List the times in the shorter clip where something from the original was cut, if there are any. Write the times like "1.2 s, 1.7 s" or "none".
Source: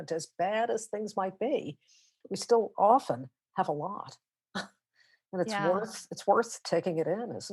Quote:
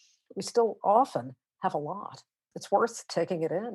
2.5 s